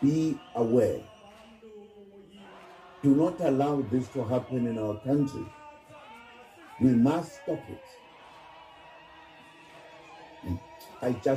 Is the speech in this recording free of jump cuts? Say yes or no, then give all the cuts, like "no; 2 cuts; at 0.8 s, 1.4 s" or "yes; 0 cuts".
yes; 0 cuts